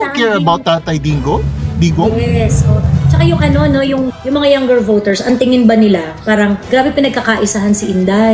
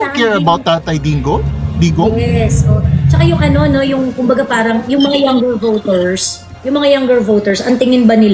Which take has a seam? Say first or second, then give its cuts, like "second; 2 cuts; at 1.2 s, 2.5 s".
first; 2 cuts; at 4.1 s, 6.6 s